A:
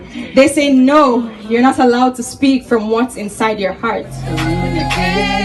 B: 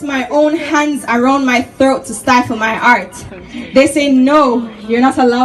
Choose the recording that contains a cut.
A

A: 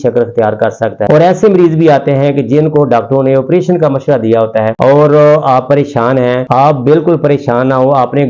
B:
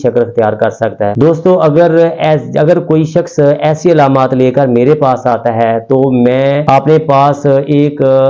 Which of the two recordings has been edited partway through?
A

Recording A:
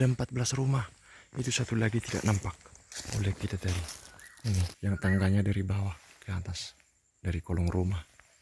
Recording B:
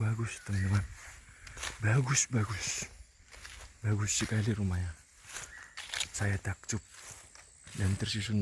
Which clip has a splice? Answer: A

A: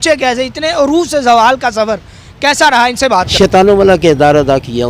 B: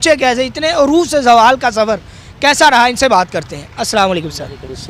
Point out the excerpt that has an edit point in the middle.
A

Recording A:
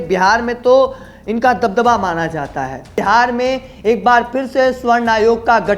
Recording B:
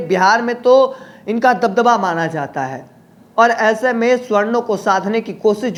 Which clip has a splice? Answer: A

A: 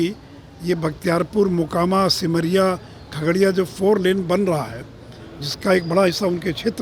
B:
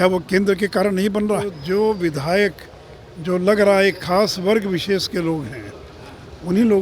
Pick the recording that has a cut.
B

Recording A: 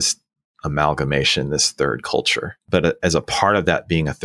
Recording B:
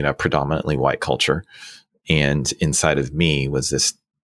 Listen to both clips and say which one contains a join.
A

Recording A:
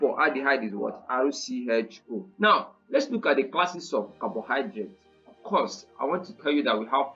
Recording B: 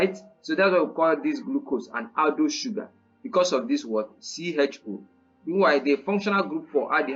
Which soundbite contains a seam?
A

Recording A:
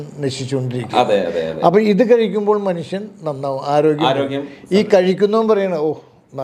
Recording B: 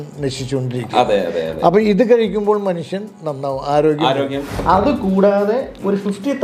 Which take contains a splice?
B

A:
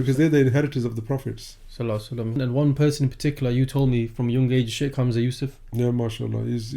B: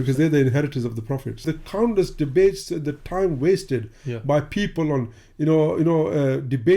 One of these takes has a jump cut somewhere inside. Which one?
B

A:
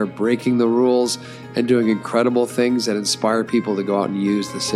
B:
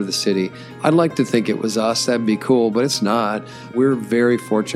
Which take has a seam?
B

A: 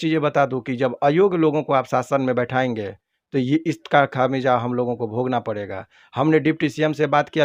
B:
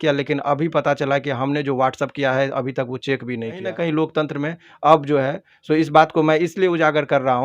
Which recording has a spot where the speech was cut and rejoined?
B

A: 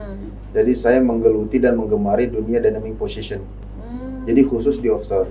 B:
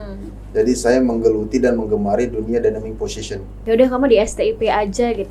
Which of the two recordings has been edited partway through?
B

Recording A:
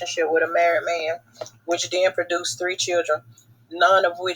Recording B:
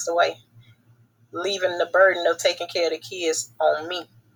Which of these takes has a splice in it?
A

